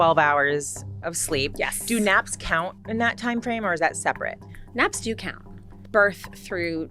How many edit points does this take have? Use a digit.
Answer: 1